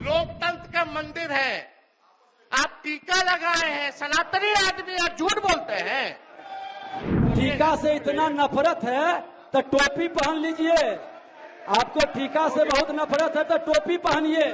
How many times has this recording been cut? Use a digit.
1